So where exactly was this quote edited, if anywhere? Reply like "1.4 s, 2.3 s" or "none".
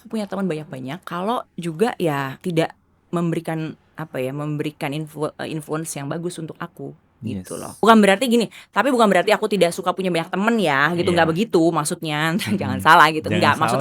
1.0 s, 2.3 s, 7.8 s